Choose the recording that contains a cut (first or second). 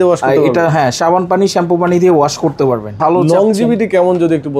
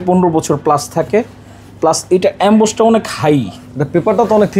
first